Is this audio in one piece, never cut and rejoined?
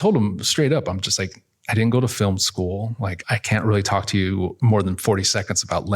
no; 2 cuts; at 3.2 s, 4.6 s

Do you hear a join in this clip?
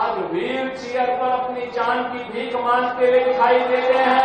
no; 0 cuts

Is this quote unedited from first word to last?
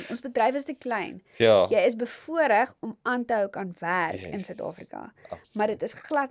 yes; 0 cuts

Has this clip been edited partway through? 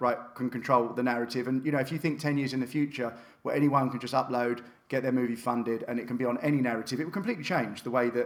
no; 0 cuts

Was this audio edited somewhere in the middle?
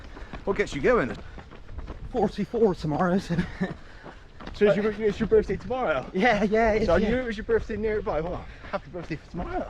yes; 1 cut; at 1.2 s

